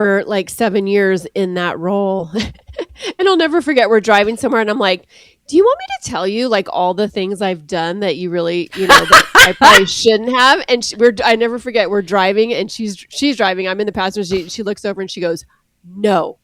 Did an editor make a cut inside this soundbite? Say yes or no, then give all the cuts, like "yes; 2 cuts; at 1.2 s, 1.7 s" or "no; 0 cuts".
no; 0 cuts